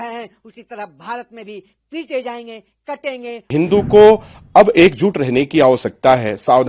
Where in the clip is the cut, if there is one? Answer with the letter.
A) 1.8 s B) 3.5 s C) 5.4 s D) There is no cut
B